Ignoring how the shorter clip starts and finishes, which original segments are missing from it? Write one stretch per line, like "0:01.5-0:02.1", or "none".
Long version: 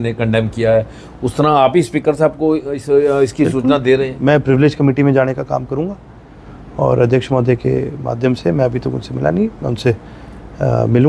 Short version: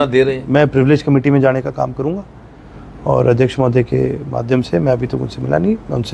none